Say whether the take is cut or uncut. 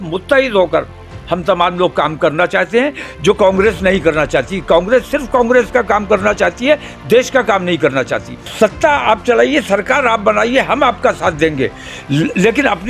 cut